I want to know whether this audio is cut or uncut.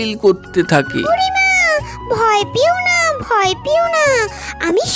cut